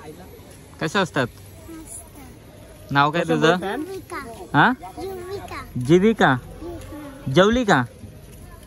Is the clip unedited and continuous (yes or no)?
yes